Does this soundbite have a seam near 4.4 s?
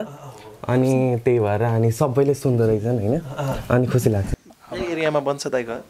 yes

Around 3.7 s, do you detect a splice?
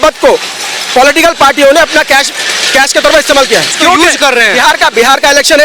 yes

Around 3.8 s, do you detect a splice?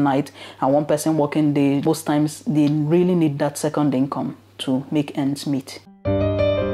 no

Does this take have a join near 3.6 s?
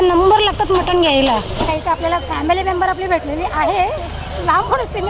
no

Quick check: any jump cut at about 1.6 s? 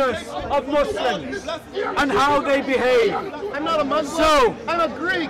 no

